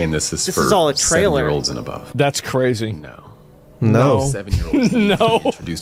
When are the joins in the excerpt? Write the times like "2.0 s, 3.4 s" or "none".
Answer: none